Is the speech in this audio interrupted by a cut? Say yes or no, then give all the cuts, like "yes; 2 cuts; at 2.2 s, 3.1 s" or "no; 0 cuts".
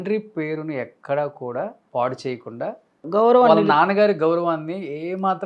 yes; 2 cuts; at 1.8 s, 3.0 s